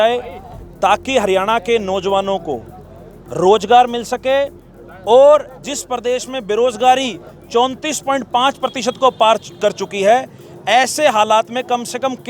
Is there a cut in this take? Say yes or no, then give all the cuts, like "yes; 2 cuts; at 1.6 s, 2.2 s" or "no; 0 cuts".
no; 0 cuts